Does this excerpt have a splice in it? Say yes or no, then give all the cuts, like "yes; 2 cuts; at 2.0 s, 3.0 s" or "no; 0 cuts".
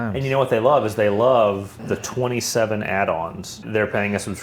yes; 2 cuts; at 1.7 s, 3.6 s